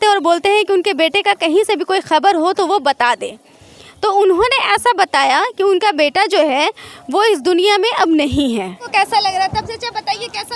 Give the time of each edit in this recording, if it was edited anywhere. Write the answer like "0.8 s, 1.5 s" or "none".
8.8 s